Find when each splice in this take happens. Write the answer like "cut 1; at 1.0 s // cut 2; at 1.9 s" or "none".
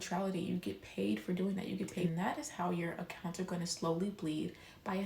cut 1; at 2.1 s